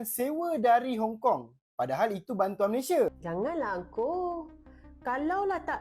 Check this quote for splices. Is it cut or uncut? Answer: cut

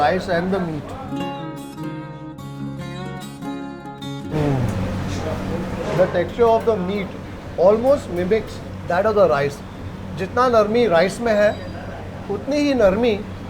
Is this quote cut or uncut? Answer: uncut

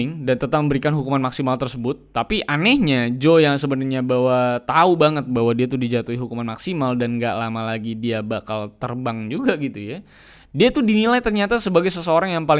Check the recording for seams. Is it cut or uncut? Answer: uncut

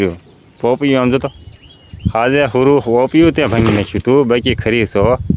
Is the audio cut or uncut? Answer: uncut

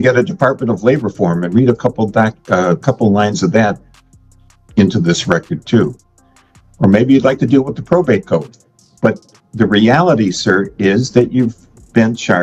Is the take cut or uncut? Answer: uncut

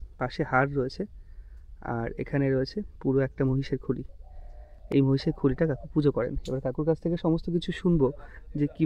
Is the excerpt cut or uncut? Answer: uncut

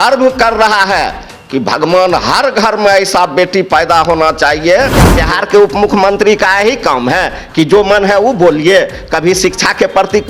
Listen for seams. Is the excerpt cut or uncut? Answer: cut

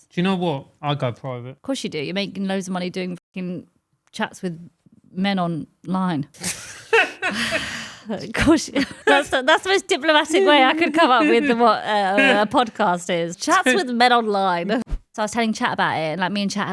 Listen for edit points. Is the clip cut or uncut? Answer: cut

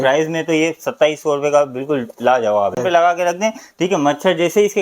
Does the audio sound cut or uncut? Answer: cut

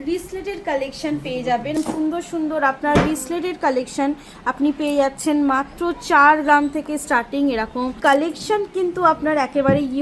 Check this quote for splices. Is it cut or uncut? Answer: cut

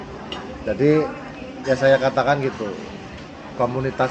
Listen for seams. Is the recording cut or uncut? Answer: uncut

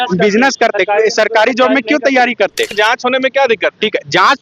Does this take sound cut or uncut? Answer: cut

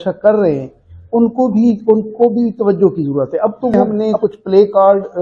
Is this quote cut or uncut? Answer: cut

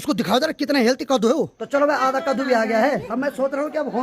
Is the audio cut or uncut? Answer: cut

